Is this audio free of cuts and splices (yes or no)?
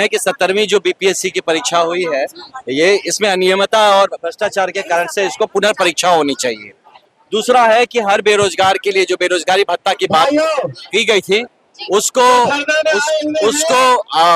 yes